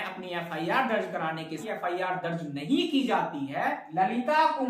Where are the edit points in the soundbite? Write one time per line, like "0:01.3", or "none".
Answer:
0:01.6
0:03.8